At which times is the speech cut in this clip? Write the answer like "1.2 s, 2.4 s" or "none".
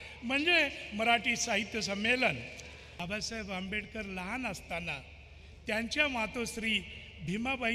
2.9 s